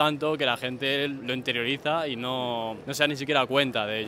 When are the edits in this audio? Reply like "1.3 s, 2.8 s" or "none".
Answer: none

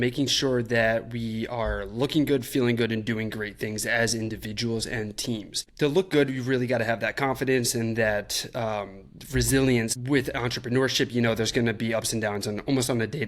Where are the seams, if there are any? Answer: 5.6 s, 9.9 s

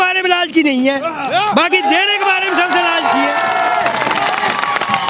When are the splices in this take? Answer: none

